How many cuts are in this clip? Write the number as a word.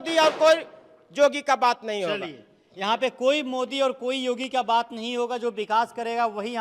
zero